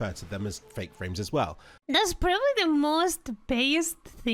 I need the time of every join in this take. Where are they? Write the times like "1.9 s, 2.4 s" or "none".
none